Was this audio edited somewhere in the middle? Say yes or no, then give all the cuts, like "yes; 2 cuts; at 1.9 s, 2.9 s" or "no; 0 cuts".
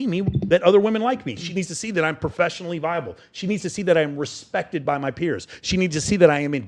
no; 0 cuts